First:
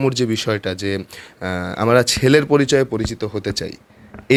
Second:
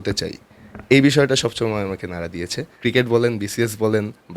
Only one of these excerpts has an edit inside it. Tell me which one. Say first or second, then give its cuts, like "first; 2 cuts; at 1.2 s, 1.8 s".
second; 1 cut; at 2.7 s